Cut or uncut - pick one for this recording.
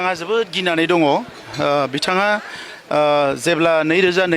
uncut